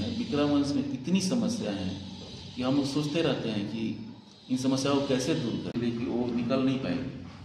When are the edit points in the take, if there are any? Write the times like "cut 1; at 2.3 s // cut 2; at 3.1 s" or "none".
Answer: cut 1; at 5.8 s

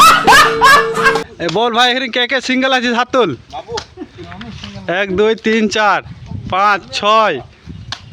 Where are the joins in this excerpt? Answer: cut 1; at 1.3 s

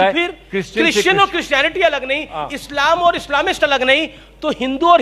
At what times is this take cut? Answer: none

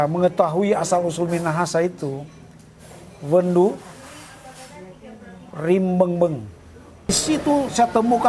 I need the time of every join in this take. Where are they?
cut 1; at 7.1 s

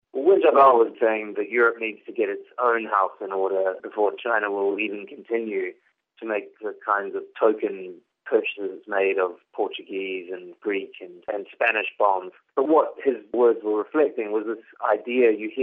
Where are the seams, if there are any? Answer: cut 1; at 0.9 s // cut 2; at 11.3 s

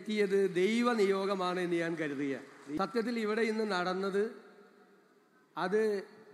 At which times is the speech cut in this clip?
cut 1; at 2.8 s

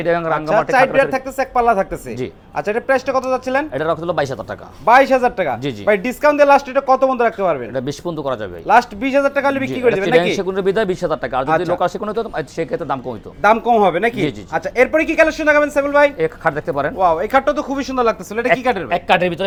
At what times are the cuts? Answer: none

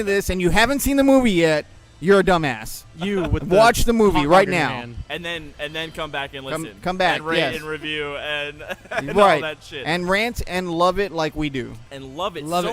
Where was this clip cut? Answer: cut 1; at 4.4 s

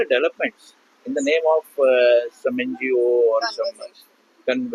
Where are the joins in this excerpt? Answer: none

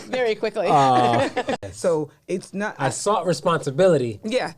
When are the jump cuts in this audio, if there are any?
cut 1; at 1.7 s

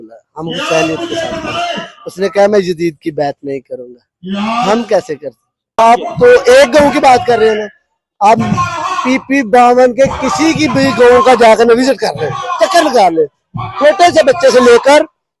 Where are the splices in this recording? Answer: cut 1; at 5.8 s

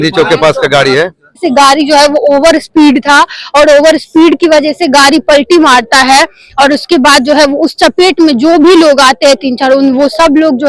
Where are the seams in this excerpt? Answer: cut 1; at 1.4 s

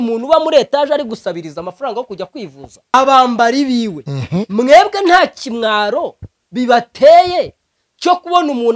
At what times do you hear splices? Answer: cut 1; at 2.9 s

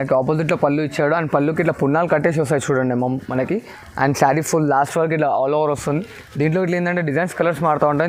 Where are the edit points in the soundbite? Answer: none

